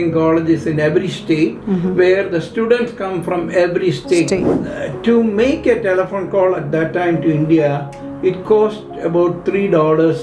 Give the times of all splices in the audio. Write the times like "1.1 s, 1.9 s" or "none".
4.6 s

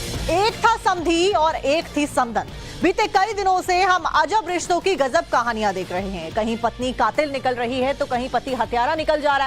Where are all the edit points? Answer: 1.2 s

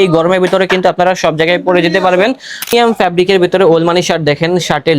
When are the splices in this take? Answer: 2.7 s

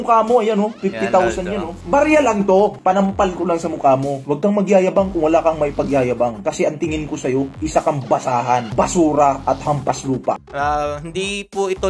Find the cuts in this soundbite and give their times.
1.8 s, 10.4 s

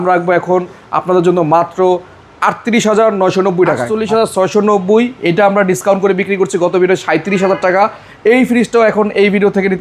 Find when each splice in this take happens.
3.9 s

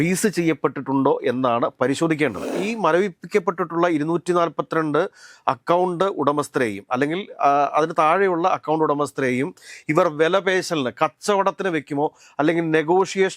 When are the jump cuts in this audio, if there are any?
2.6 s

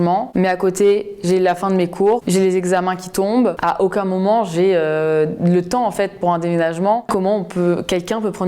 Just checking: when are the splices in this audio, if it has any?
7.1 s

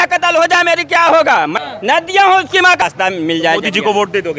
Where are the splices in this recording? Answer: 1.5 s, 2.8 s

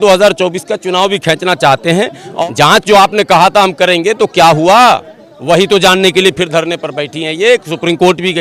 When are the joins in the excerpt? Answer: 2.3 s

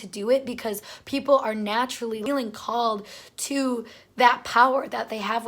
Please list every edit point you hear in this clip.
2.2 s

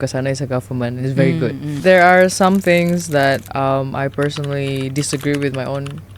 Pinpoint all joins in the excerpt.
1.7 s

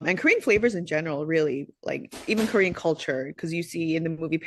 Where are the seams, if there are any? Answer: none

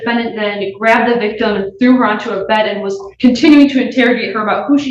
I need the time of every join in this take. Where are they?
none

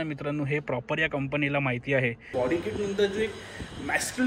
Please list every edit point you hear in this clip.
2.3 s

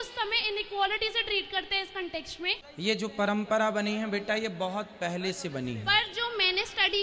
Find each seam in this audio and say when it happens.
2.7 s

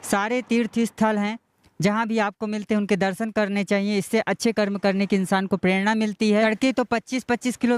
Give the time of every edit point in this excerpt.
6.4 s

